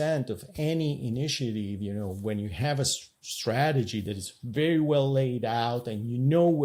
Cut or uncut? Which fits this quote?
uncut